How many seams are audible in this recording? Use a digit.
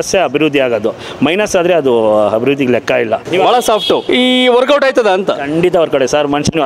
2